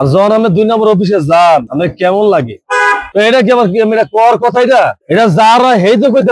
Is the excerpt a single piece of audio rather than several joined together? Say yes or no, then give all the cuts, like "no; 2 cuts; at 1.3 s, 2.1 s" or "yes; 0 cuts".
yes; 0 cuts